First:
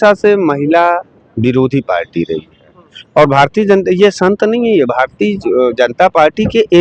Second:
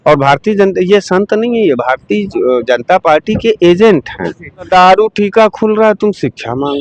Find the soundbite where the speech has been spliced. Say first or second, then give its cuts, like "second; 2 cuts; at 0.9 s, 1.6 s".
second; 1 cut; at 4.7 s